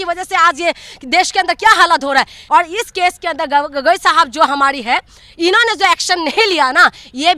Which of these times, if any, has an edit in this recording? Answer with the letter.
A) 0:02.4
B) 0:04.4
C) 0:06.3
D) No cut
A